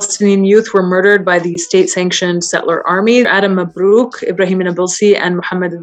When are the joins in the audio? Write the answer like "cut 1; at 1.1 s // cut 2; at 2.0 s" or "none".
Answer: cut 1; at 3.3 s